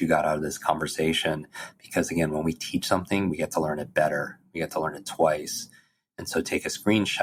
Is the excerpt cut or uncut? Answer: uncut